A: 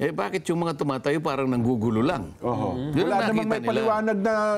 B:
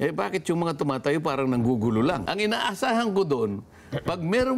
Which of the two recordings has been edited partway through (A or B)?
B